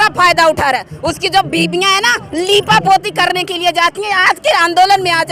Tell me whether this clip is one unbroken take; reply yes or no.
yes